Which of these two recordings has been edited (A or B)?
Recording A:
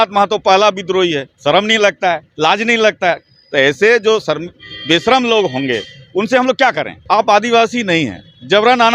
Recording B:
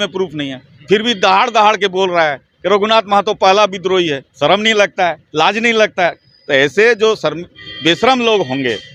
A